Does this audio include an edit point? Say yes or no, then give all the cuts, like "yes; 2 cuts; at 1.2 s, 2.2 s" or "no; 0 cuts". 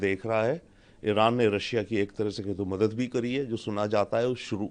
no; 0 cuts